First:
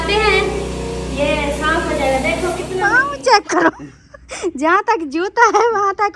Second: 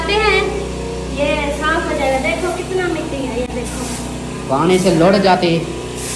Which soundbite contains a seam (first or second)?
first